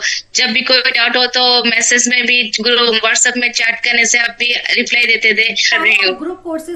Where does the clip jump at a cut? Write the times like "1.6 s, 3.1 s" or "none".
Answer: 5.7 s